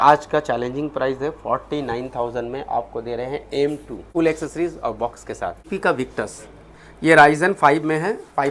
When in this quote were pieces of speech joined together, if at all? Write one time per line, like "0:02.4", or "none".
0:04.0
0:05.7

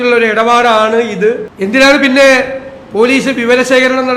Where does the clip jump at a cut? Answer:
0:01.5

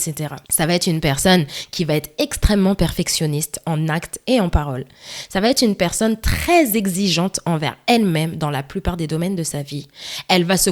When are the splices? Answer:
none

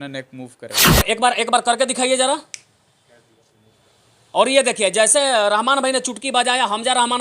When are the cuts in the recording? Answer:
0:01.0

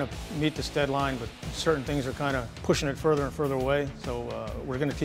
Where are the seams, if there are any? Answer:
0:01.5
0:02.5

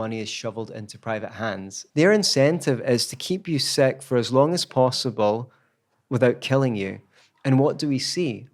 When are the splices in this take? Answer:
0:01.8

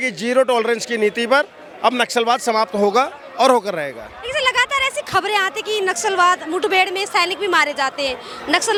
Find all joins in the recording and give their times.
none

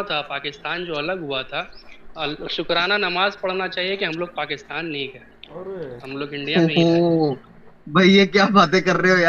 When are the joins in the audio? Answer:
none

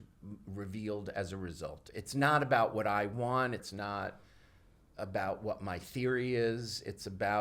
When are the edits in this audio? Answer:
0:01.9
0:03.7

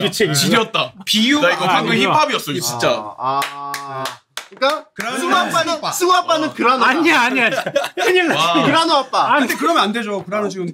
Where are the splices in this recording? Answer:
none

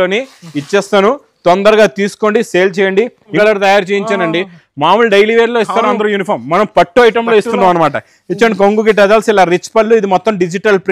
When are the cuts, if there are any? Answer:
0:03.3

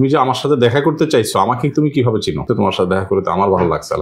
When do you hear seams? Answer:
0:02.4

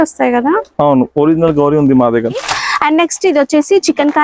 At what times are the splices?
0:02.5

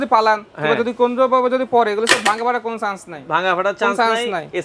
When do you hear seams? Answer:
none

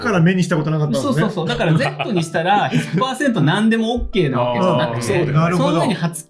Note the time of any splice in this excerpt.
none

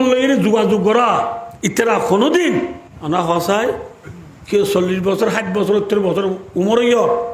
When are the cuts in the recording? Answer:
0:01.5
0:02.9

